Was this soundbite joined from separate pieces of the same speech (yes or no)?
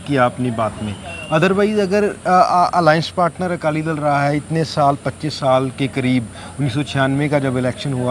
no